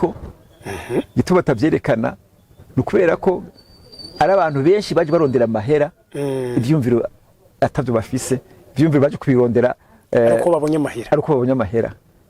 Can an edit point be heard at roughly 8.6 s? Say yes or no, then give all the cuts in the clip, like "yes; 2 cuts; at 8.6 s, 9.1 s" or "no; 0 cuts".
no; 0 cuts